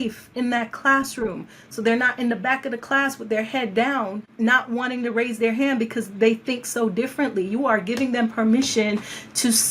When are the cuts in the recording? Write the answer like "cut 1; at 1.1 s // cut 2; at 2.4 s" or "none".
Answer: cut 1; at 4.2 s